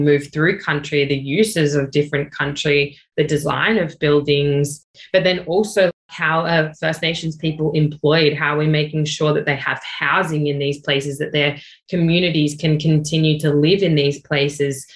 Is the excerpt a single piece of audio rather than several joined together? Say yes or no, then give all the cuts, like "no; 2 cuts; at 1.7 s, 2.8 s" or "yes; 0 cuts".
yes; 0 cuts